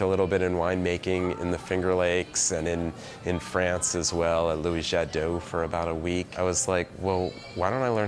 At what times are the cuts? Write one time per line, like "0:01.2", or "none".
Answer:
0:06.3